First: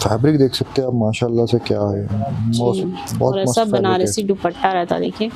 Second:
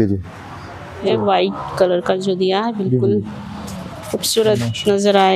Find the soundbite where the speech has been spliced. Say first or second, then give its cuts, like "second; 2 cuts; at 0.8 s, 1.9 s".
second; 1 cut; at 1.1 s